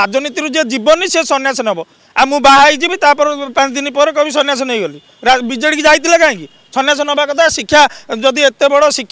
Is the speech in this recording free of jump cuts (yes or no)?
yes